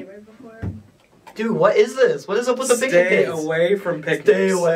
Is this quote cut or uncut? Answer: uncut